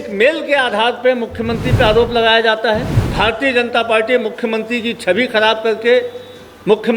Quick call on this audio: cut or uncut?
cut